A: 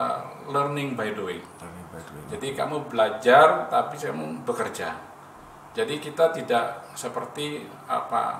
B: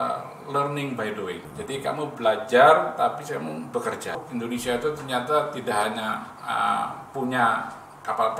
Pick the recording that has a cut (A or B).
B